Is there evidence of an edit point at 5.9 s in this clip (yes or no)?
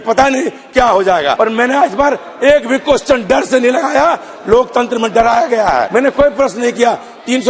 yes